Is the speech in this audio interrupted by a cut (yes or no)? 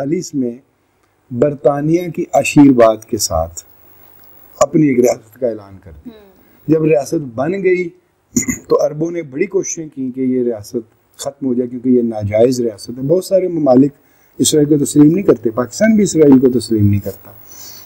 no